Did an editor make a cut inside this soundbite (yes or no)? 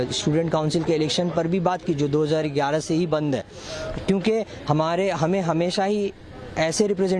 no